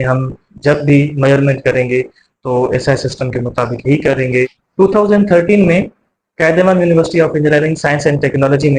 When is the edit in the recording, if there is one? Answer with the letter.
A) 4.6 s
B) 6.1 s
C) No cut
A